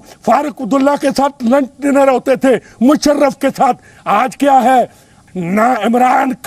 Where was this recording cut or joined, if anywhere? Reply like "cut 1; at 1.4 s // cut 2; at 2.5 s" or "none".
cut 1; at 5.2 s